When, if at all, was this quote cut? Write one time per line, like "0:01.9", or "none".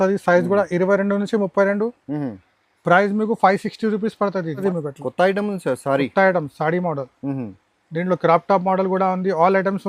0:04.6